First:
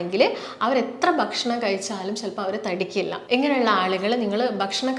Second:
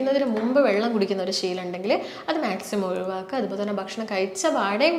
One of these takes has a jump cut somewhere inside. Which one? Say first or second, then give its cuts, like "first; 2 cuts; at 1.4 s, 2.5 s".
first; 1 cut; at 3.2 s